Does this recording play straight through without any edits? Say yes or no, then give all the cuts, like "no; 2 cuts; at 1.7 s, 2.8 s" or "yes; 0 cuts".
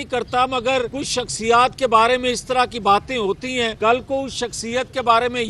no; 2 cuts; at 1.0 s, 3.7 s